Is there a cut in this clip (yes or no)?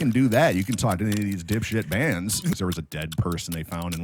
yes